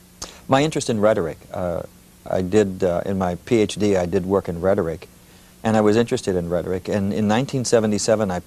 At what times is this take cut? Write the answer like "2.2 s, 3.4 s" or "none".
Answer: none